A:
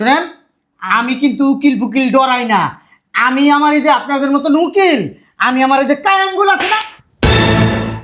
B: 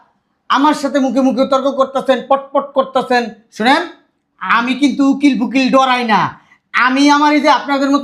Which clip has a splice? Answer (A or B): A